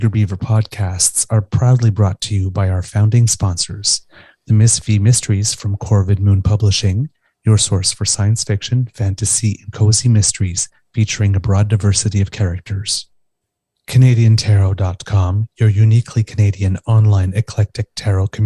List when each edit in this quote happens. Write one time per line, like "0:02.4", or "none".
none